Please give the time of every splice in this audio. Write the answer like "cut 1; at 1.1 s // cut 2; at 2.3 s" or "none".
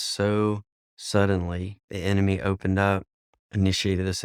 cut 1; at 1.9 s